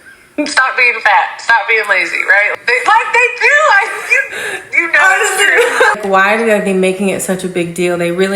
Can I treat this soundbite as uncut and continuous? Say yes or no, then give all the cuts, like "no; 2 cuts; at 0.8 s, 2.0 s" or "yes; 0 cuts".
no; 2 cuts; at 2.5 s, 6.0 s